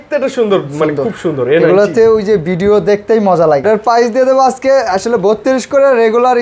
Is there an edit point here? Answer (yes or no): yes